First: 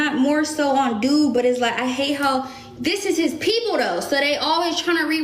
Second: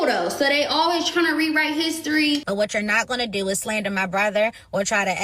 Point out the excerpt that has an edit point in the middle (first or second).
second